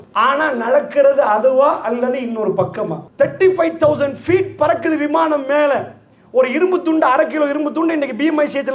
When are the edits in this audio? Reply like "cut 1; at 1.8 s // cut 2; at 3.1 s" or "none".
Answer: cut 1; at 3.0 s